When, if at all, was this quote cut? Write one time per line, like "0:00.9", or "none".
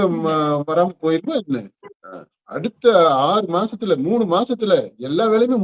none